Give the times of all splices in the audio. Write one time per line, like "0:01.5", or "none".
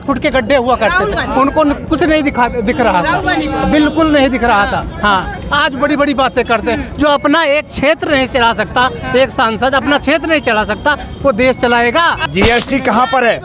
0:12.3